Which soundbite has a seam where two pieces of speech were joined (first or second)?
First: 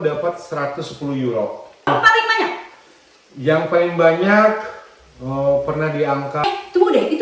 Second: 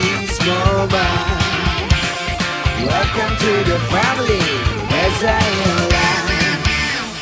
first